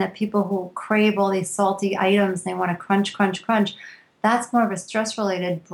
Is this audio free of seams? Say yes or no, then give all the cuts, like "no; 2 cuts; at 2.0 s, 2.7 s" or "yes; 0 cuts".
yes; 0 cuts